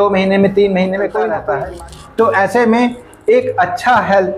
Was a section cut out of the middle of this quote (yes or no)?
yes